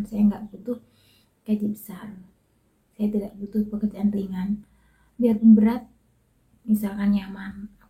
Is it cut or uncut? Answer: uncut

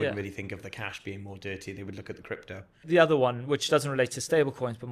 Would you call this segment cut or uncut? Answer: cut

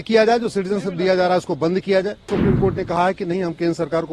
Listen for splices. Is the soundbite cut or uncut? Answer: cut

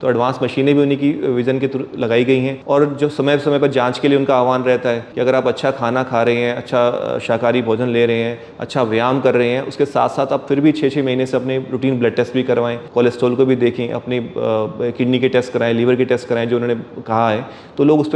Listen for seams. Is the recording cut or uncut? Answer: cut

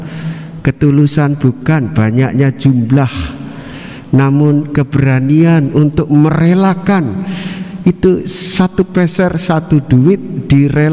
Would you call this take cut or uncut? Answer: uncut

